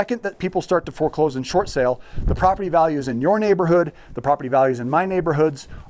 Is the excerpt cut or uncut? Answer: uncut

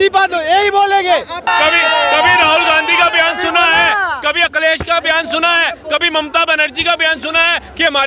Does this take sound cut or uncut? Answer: cut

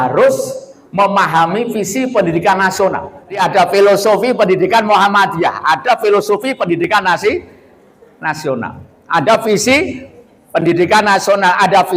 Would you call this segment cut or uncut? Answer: cut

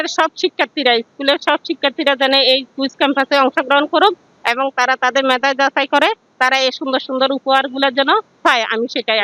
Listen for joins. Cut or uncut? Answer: uncut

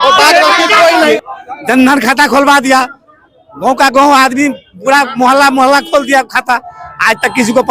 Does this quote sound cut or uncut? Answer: cut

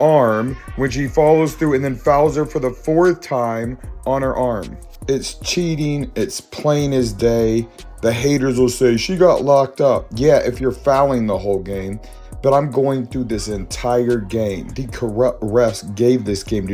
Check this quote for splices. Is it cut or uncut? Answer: uncut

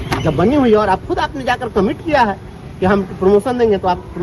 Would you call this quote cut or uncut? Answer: uncut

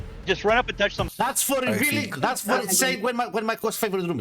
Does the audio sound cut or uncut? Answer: cut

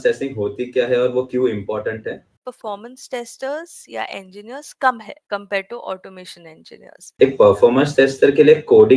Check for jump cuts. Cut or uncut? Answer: cut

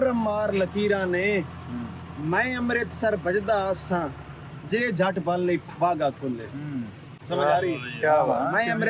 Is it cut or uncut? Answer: uncut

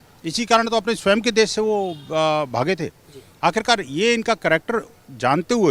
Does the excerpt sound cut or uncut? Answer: uncut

